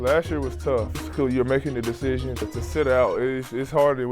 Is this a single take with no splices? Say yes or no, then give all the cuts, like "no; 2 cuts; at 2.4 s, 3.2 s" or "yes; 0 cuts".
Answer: no; 2 cuts; at 0.9 s, 2.4 s